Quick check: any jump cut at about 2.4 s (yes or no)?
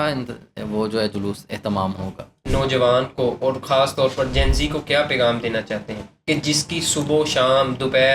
yes